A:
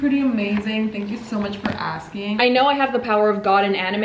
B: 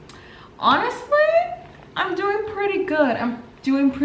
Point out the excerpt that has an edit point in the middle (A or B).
A